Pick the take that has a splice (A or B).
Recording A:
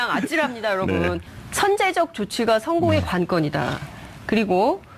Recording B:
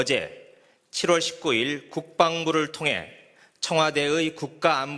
A